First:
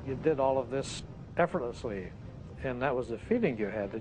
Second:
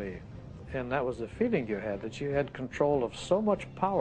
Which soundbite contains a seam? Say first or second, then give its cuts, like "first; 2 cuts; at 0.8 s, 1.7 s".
first; 1 cut; at 1.0 s